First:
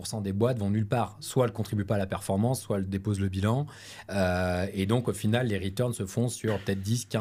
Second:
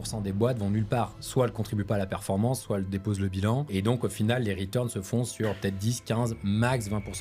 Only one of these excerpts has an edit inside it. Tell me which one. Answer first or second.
second